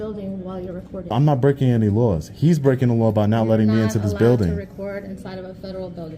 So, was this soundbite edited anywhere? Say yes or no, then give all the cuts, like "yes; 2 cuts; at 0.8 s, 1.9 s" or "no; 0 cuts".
yes; 1 cut; at 1.1 s